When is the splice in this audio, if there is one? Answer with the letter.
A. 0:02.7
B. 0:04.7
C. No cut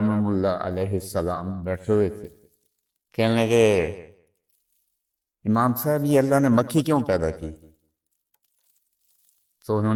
C